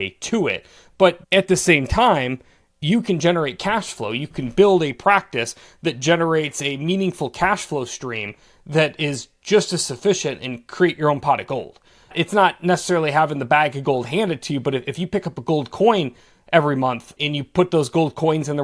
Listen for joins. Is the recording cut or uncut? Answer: cut